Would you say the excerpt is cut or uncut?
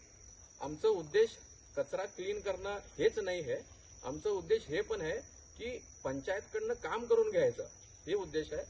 uncut